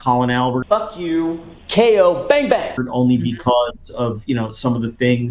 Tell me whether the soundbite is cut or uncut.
uncut